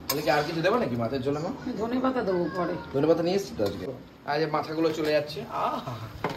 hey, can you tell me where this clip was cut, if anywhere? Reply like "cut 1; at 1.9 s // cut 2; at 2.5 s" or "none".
cut 1; at 4.1 s